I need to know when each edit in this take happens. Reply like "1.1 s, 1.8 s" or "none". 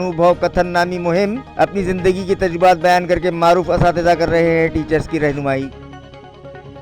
5.7 s